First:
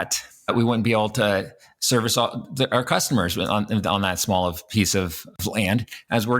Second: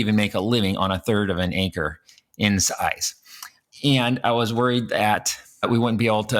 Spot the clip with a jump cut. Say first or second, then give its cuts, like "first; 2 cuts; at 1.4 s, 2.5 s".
first; 1 cut; at 5.4 s